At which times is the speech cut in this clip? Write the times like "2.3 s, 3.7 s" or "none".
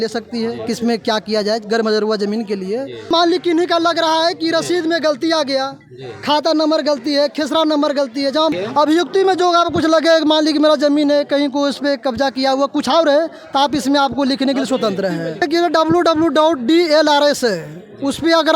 3.1 s, 8.5 s, 15.4 s